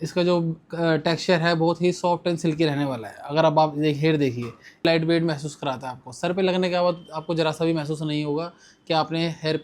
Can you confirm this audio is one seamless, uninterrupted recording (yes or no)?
no